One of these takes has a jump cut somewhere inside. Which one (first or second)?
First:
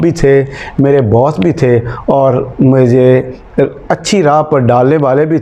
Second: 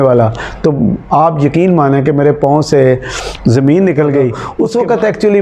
second